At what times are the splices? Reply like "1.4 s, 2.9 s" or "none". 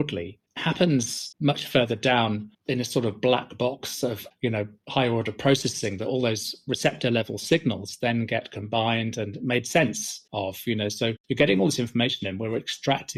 none